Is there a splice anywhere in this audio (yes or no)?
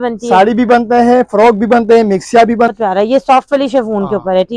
yes